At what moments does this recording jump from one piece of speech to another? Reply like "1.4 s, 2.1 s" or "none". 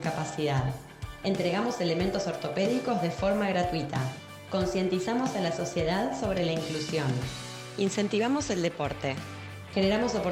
none